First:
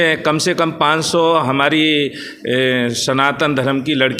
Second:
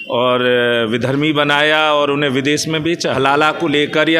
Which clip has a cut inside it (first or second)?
second